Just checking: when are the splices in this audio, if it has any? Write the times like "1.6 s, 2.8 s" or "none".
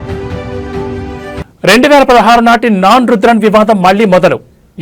none